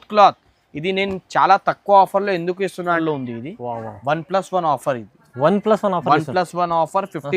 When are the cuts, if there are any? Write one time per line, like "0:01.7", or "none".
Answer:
0:03.0